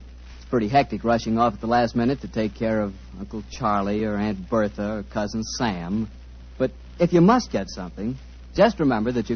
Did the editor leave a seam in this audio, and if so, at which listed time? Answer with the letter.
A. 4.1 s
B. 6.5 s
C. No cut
A